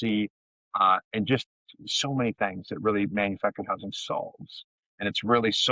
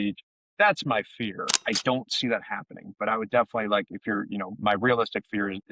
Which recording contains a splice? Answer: second; 1 cut; at 1.6 s

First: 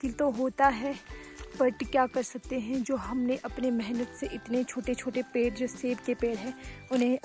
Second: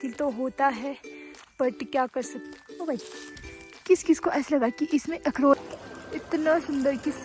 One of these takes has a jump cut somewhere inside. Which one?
second; 2 cuts; at 2.4 s, 5.5 s

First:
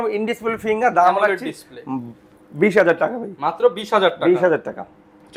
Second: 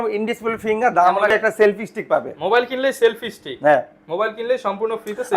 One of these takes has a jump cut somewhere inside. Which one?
second; 1 cut; at 1.3 s

